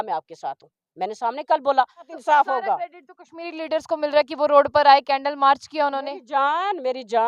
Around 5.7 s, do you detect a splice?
no; 1 cut; at 2.1 s

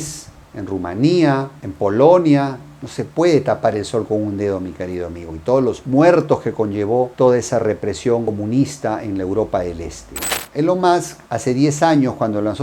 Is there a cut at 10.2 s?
yes; 1 cut; at 10.2 s

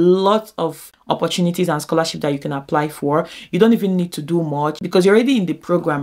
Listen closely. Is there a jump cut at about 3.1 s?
no; 2 cuts; at 0.8 s, 4.8 s

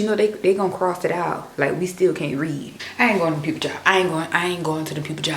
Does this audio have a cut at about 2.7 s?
yes; 1 cut; at 2.7 s

